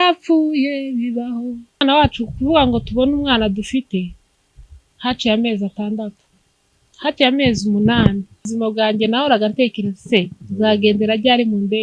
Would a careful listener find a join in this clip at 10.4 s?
no; 2 cuts; at 1.8 s, 8.5 s

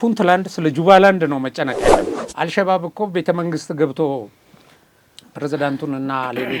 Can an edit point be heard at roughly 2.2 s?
yes; 1 cut; at 2.2 s

